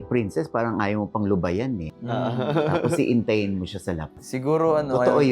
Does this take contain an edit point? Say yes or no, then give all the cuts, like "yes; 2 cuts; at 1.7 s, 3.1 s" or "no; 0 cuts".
yes; 1 cut; at 1.9 s